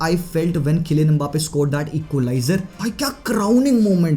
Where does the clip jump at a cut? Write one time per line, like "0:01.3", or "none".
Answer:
0:02.7